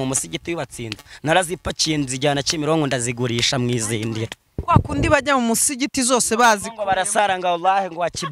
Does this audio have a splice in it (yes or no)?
no